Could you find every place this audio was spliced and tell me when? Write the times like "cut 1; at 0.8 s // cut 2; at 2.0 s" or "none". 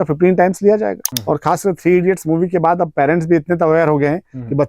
cut 1; at 1.1 s